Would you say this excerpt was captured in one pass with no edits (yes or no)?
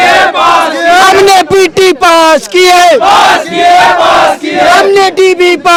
yes